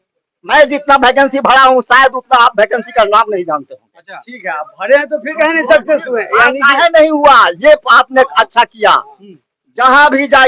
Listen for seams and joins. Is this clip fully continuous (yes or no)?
yes